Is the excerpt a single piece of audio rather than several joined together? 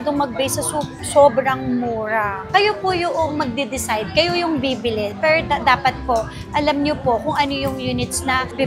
yes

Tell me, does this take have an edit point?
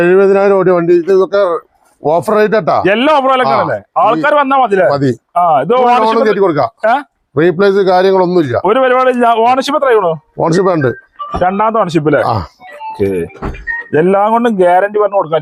no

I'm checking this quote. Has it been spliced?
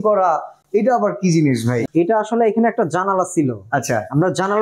yes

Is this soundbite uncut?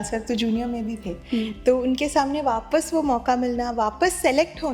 yes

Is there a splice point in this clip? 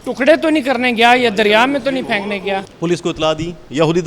yes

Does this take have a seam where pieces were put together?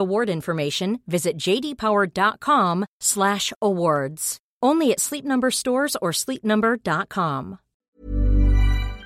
yes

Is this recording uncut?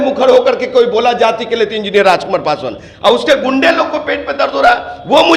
yes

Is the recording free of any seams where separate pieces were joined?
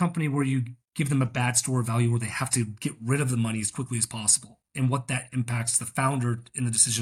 yes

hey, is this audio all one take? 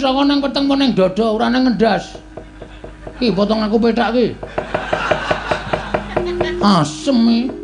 yes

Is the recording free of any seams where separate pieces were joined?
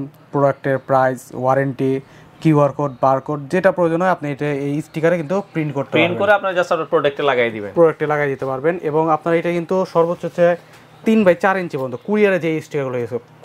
yes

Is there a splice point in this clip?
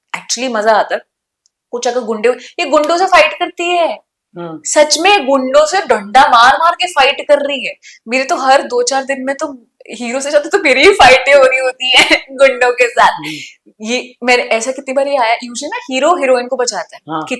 no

